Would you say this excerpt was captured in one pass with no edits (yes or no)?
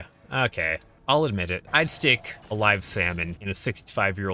no